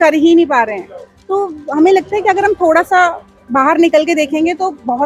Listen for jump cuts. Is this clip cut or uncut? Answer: uncut